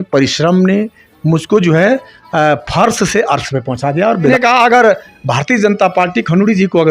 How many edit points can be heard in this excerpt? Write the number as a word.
one